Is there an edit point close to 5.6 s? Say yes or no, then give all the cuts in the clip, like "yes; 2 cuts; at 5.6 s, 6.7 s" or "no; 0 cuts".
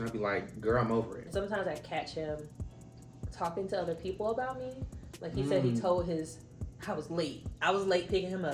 no; 1 cut; at 1.2 s